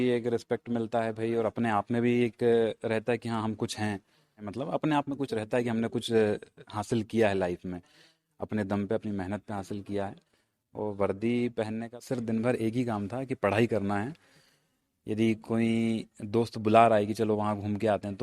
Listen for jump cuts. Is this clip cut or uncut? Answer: cut